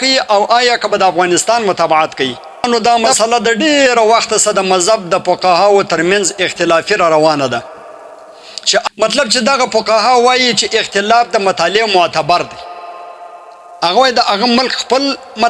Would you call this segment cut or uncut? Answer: cut